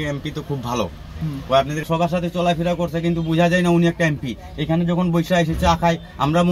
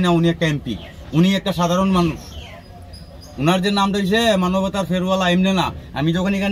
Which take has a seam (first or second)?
first